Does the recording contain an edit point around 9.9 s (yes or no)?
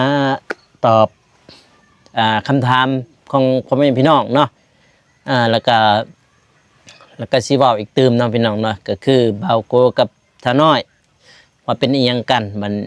no